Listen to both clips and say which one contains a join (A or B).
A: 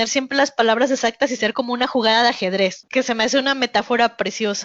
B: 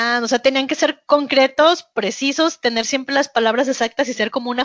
A